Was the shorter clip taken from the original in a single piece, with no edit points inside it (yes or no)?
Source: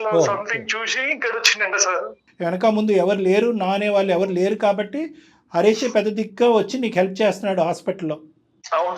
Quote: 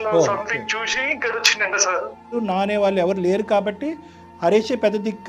no